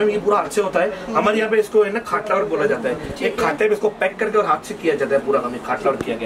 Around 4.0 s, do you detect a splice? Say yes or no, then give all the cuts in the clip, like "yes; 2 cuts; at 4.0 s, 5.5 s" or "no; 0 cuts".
no; 0 cuts